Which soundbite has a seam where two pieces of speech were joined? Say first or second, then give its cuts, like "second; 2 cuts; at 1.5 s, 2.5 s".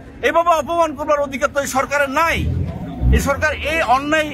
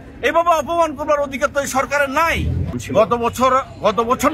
second; 1 cut; at 2.7 s